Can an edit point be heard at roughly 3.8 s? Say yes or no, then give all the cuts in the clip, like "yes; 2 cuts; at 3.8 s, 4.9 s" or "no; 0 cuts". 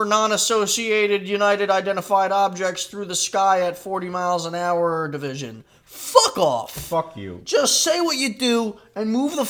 no; 0 cuts